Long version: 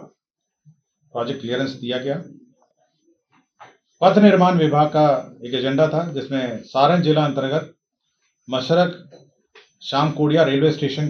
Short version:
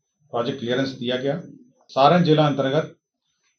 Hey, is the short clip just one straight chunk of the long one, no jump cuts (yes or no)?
no